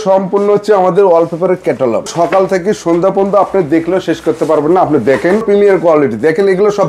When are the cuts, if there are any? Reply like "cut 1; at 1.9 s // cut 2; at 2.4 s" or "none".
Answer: cut 1; at 2.1 s // cut 2; at 5.4 s